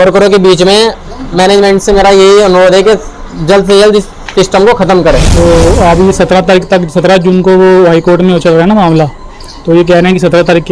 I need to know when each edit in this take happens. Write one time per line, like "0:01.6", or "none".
0:05.3